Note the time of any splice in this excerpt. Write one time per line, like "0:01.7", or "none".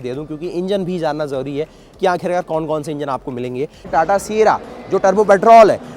0:03.9